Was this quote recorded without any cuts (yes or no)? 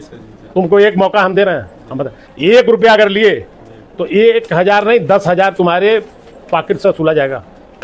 yes